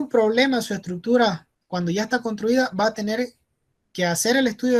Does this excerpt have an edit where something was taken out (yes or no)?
no